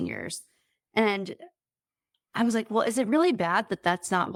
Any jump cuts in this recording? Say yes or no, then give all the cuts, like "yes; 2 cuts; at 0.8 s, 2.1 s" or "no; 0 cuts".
no; 0 cuts